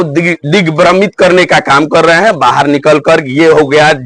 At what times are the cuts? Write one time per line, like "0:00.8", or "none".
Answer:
none